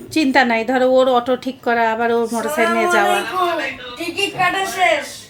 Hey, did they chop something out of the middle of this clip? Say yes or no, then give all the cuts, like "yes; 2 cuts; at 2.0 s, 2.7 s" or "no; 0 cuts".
no; 0 cuts